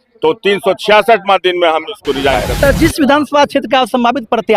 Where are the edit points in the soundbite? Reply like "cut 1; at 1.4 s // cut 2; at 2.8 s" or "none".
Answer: cut 1; at 2.5 s